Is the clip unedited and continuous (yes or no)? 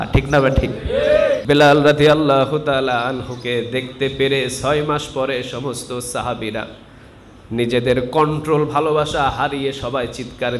no